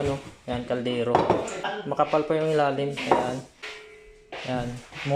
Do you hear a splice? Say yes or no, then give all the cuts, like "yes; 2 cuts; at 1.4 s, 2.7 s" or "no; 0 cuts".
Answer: no; 0 cuts